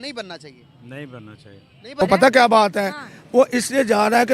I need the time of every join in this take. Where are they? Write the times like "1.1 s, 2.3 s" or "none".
2.0 s